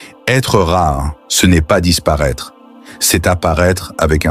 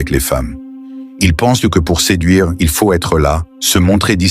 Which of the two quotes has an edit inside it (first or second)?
second